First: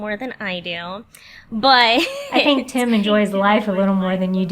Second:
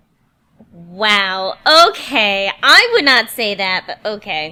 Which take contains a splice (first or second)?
first